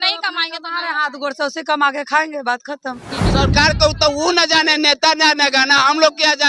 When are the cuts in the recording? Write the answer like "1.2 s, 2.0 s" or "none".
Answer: 3.2 s